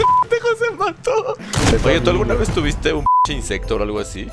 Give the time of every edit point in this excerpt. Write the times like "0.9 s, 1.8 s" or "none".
1.4 s